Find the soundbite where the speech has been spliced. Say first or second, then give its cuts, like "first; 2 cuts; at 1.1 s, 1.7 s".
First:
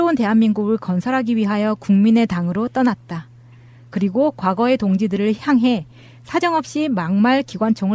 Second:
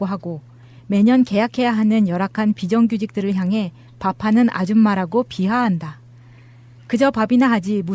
first; 1 cut; at 2.7 s